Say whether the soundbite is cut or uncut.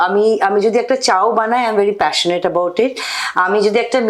uncut